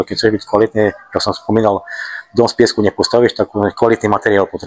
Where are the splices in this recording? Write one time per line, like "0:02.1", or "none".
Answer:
none